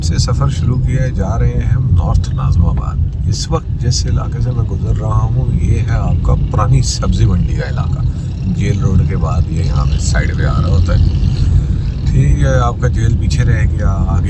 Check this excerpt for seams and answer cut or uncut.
uncut